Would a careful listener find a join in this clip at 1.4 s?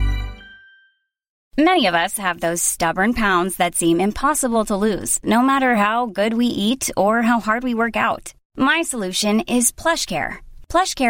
yes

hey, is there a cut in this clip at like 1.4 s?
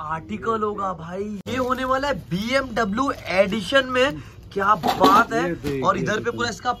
yes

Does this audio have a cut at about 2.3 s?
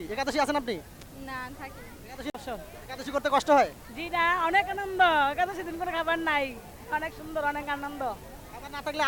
yes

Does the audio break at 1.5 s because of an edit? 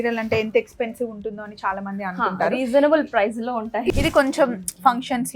no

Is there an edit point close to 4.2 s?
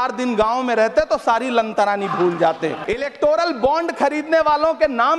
no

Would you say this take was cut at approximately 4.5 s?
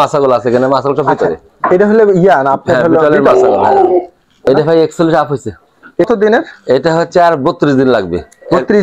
yes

